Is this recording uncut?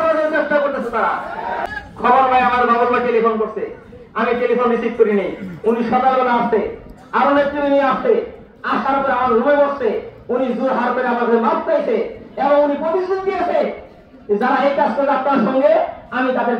no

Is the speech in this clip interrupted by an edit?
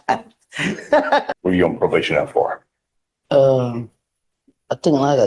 yes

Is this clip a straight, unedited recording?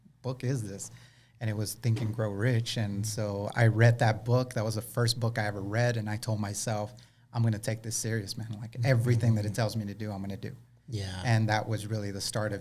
yes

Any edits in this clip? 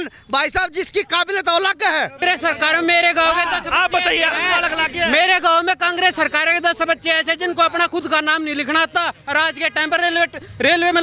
yes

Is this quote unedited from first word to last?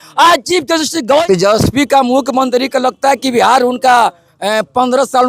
no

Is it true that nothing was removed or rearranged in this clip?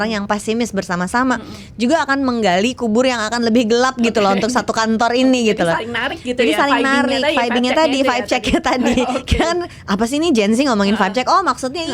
yes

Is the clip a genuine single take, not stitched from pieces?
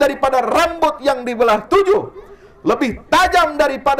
yes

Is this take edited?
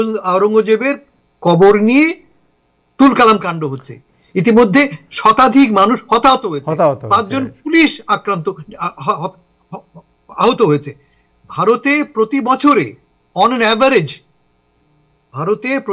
no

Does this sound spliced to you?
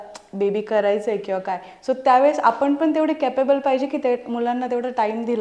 no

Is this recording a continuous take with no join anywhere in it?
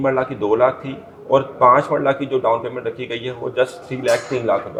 yes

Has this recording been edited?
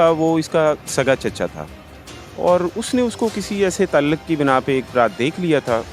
no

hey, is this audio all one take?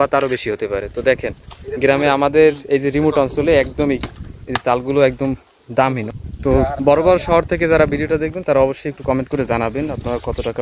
no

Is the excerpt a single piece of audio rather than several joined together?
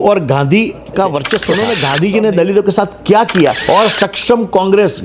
no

